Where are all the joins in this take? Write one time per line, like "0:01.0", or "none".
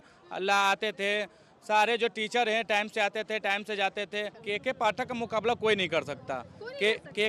0:04.4